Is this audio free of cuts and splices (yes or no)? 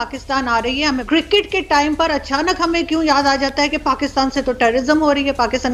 no